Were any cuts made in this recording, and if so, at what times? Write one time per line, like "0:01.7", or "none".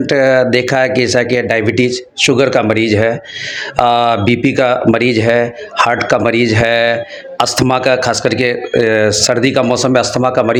none